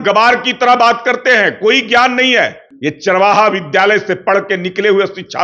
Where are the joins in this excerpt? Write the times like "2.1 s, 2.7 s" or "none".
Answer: 3.0 s